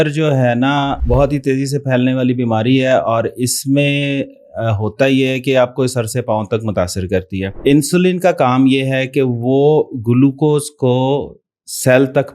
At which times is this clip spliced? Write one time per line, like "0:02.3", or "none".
0:01.0
0:07.5